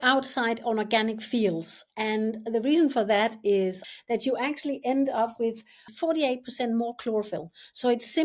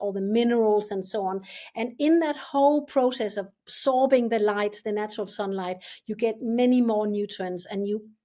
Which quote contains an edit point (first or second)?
first